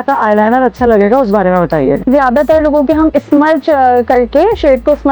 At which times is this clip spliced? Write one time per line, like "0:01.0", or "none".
0:02.0